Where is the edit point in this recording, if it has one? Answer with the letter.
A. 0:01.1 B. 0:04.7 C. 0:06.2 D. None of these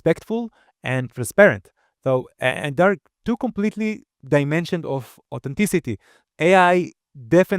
C